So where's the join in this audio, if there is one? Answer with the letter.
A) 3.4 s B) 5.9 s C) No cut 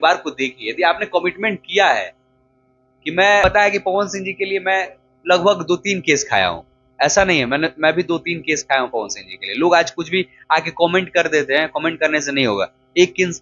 A